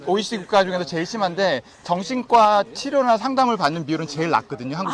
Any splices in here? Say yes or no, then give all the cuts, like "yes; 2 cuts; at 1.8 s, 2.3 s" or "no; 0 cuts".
no; 0 cuts